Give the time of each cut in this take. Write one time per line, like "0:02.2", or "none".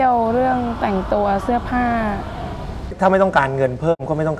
0:02.9